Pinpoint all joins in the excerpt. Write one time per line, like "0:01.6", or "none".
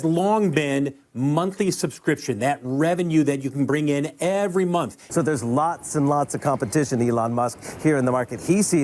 0:05.0